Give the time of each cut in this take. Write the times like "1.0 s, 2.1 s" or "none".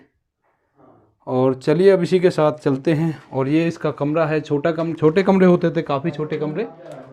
none